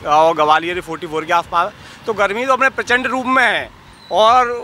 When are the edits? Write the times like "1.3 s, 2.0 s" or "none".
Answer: none